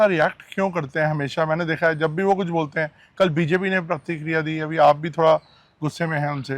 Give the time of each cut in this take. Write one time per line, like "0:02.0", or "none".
none